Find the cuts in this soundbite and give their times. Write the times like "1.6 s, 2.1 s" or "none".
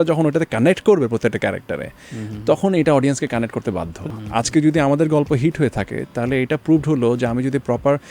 4.0 s